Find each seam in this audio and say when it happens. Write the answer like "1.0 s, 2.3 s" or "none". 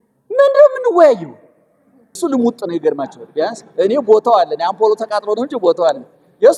2.2 s